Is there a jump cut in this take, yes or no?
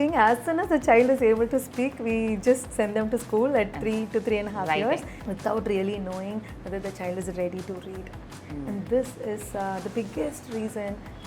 yes